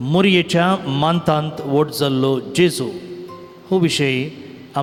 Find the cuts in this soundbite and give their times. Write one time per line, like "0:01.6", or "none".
none